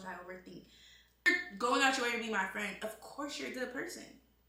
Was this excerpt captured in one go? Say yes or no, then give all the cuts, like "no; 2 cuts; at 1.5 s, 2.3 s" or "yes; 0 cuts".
no; 1 cut; at 1.3 s